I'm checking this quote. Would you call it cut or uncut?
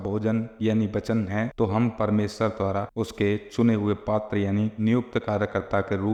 uncut